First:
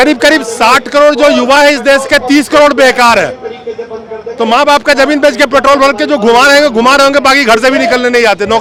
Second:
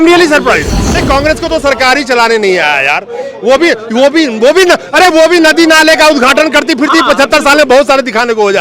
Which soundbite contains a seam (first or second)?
second